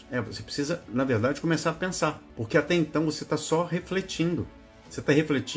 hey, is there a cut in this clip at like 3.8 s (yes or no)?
no